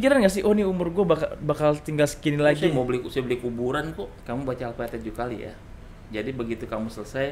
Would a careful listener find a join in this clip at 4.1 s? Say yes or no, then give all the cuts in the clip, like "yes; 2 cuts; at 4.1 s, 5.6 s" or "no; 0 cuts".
yes; 1 cut; at 4.1 s